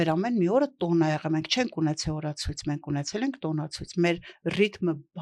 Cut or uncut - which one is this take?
uncut